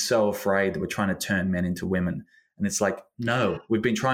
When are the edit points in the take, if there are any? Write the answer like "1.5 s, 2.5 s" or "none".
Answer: none